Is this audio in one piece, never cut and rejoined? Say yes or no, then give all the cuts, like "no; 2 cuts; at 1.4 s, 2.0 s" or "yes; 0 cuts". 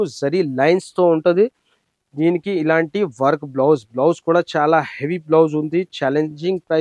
yes; 0 cuts